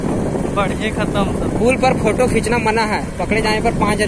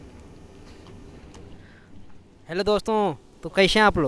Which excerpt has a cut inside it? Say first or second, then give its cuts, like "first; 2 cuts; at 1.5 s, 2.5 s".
second; 1 cut; at 2.2 s